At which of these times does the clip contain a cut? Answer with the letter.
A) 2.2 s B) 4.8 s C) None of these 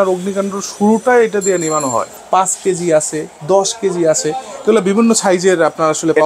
A